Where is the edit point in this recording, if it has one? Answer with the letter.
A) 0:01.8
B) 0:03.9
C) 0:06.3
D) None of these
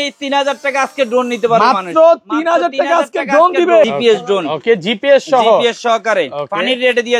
B